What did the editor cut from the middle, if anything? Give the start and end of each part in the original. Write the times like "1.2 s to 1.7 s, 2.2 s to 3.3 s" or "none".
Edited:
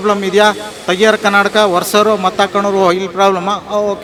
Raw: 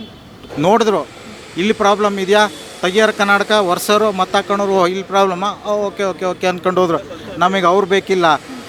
none